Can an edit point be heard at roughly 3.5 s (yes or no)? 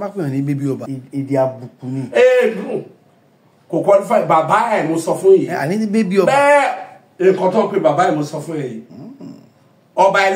no